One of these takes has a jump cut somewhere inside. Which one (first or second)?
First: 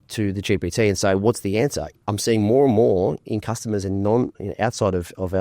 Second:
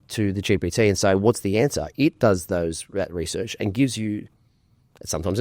first